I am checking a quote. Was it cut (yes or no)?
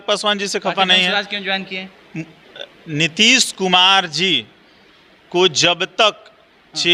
no